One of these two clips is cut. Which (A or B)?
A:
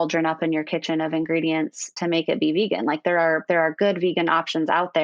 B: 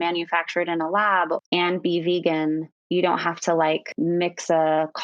B